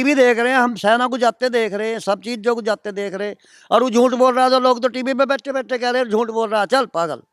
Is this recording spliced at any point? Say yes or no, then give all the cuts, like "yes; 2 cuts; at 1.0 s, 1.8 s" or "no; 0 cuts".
no; 0 cuts